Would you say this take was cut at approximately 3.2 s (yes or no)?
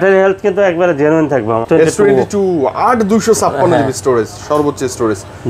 no